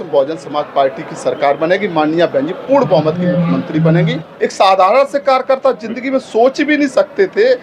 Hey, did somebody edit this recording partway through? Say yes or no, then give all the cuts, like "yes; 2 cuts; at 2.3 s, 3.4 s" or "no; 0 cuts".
yes; 1 cut; at 4.2 s